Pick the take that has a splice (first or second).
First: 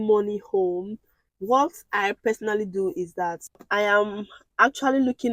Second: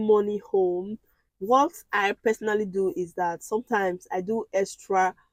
first